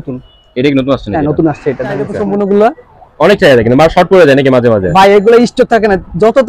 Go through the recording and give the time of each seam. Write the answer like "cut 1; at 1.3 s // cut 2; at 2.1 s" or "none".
cut 1; at 2.1 s